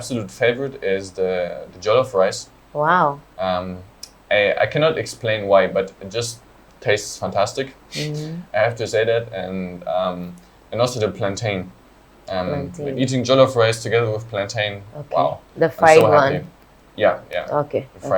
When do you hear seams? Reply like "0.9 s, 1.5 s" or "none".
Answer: none